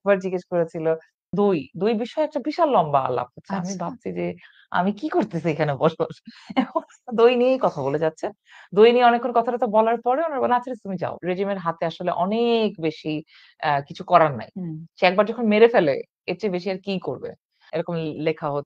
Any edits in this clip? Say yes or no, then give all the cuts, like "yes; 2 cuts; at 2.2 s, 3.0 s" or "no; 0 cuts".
yes; 3 cuts; at 1.3 s, 11.2 s, 17.6 s